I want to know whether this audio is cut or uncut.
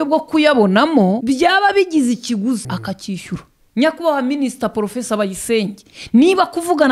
cut